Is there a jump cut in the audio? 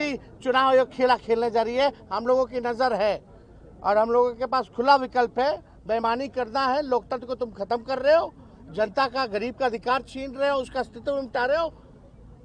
no; 0 cuts

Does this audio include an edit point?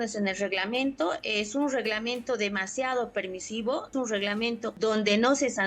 yes; 1 cut; at 4.3 s

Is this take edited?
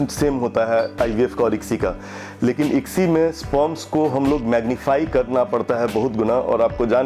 no; 0 cuts

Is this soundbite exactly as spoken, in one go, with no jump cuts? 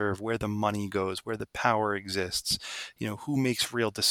yes; 0 cuts

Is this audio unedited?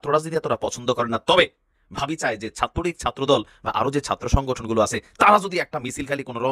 yes; 0 cuts

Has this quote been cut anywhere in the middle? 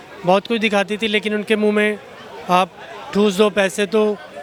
no; 0 cuts

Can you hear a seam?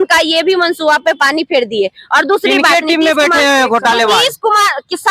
no; 0 cuts

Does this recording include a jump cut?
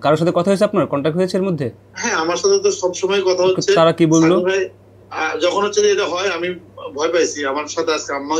no; 0 cuts

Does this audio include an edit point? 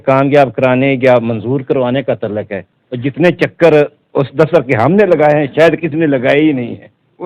yes; 1 cut; at 2.7 s

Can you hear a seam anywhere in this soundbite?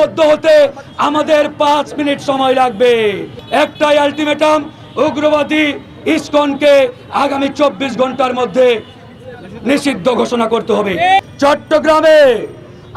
yes; 2 cuts; at 3.3 s, 11.3 s

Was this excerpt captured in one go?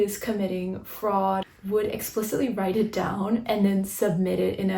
no; 1 cut; at 1.5 s

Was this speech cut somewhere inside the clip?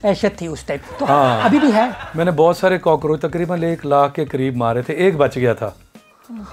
no; 0 cuts

